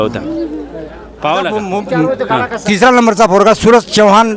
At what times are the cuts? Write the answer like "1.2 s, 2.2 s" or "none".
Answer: 1.6 s